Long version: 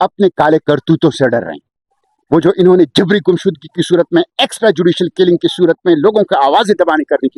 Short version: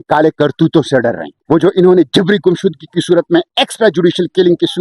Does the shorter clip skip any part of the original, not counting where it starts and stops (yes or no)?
yes